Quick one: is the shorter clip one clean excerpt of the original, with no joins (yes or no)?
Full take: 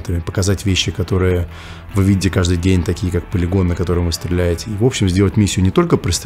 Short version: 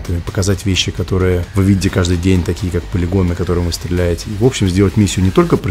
no